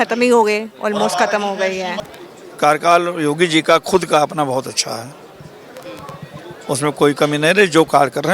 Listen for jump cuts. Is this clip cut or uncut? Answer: cut